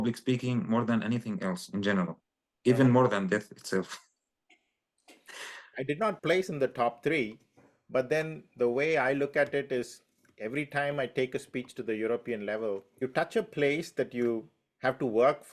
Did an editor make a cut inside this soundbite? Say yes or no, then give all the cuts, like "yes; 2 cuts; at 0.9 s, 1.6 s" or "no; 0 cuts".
yes; 2 cuts; at 5.7 s, 13.0 s